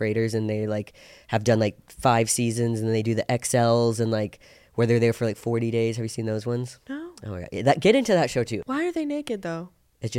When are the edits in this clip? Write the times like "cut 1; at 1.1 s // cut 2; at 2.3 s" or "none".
cut 1; at 8.6 s